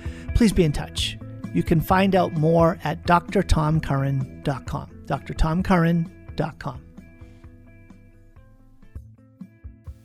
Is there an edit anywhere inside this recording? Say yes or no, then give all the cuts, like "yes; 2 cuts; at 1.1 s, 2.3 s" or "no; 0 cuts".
yes; 1 cut; at 9.0 s